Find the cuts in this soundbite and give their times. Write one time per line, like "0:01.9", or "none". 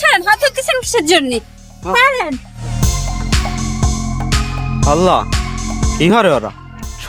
none